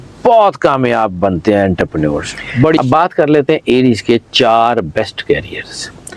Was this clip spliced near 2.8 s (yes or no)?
yes